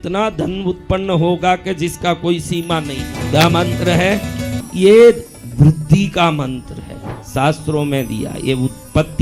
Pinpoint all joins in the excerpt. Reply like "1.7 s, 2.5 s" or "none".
3.1 s, 4.6 s